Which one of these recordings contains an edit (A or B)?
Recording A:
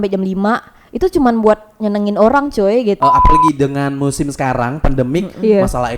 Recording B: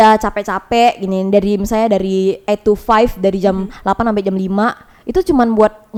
A